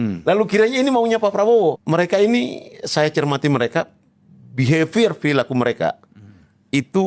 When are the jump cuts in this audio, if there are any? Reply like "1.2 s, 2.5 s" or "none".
1.8 s